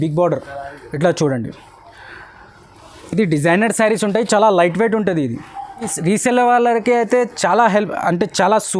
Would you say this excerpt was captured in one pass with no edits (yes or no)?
no